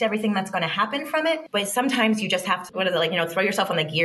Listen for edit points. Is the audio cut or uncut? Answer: cut